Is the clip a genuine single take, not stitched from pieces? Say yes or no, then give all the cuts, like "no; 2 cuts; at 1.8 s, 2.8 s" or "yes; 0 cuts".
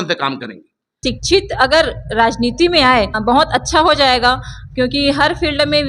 no; 2 cuts; at 0.9 s, 3.2 s